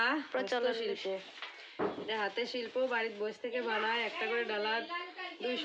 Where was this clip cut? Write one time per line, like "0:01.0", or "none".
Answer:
none